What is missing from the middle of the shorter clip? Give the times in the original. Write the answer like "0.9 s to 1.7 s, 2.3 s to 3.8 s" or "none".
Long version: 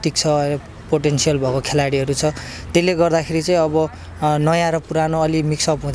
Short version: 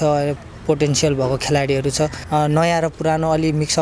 2.4 s to 4.1 s